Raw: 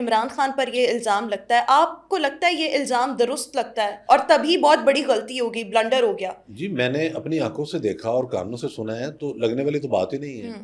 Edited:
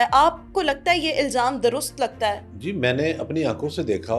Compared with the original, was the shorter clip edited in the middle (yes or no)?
yes